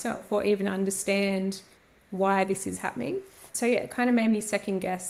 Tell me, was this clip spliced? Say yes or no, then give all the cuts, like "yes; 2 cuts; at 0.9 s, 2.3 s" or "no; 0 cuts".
no; 0 cuts